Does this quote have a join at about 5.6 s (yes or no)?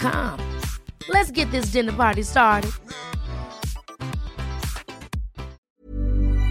yes